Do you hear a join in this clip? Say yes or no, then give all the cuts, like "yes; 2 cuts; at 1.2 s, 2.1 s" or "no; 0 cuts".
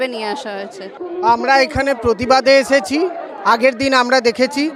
no; 0 cuts